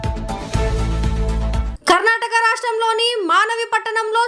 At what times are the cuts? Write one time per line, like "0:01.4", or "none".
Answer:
0:01.7